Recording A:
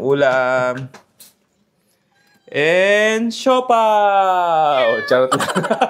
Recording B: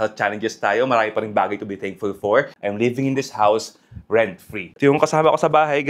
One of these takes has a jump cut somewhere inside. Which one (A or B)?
B